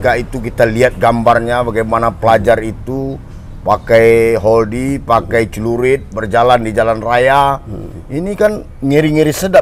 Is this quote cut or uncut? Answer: uncut